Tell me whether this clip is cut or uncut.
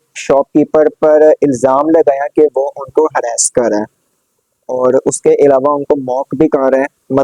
uncut